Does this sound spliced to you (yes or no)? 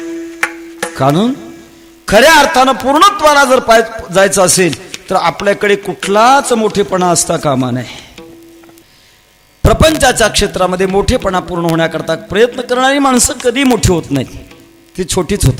yes